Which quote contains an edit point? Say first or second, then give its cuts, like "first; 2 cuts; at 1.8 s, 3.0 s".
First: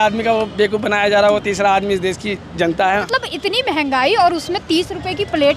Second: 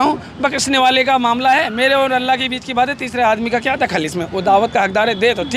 first; 1 cut; at 3.0 s